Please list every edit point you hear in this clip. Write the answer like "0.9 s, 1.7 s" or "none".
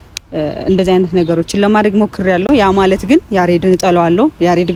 none